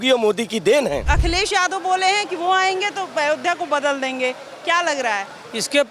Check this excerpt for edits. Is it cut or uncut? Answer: cut